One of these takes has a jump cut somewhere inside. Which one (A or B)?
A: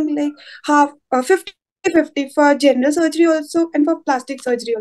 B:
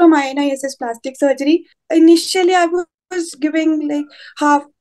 B